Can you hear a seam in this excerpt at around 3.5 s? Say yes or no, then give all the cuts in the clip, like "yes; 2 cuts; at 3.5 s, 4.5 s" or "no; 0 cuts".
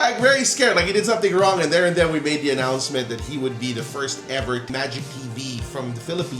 no; 1 cut; at 4.7 s